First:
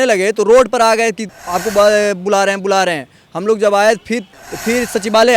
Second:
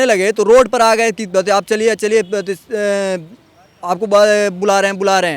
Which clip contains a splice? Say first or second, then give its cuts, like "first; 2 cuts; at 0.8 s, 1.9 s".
first; 2 cuts; at 1.2 s, 4.3 s